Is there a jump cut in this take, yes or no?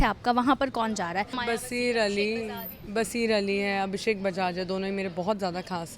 yes